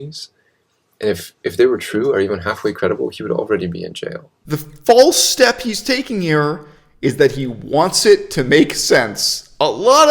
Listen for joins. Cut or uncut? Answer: cut